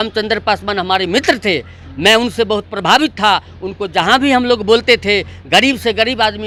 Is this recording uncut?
yes; 0 cuts

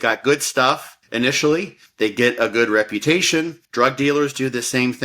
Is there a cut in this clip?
yes; 3 cuts; at 0.9 s, 1.8 s, 3.6 s

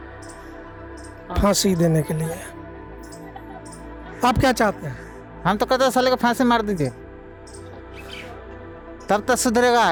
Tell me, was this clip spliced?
no; 0 cuts

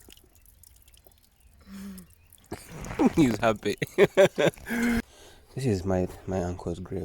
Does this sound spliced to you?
yes; 1 cut; at 5.0 s

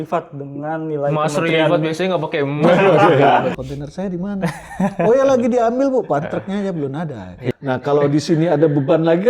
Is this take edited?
yes; 2 cuts; at 3.6 s, 7.3 s

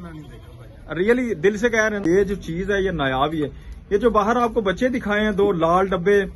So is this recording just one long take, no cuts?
no; 1 cut; at 2.0 s

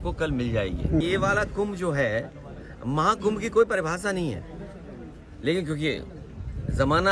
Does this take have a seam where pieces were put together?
yes; 1 cut; at 1.0 s

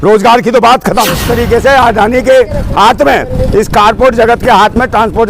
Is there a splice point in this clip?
yes; 1 cut; at 1.3 s

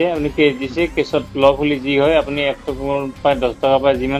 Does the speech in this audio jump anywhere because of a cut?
no; 0 cuts

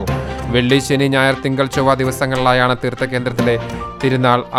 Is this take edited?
no; 0 cuts

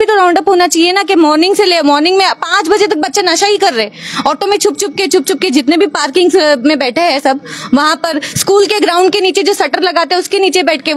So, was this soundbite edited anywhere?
no; 0 cuts

